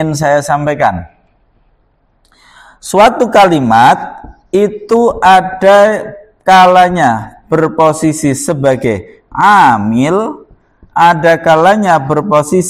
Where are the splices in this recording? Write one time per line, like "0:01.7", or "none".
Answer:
none